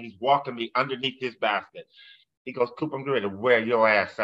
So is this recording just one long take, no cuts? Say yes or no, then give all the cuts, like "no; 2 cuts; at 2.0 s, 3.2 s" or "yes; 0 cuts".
yes; 0 cuts